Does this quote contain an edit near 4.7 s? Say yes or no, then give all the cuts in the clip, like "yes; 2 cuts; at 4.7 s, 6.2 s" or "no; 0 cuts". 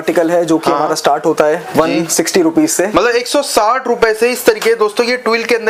no; 0 cuts